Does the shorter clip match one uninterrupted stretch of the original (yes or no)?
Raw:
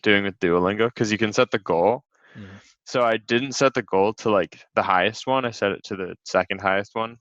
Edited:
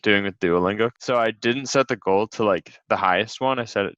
no